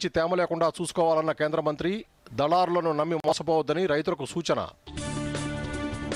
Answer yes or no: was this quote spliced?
no